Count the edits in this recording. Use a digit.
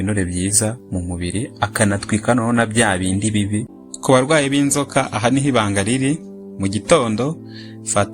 1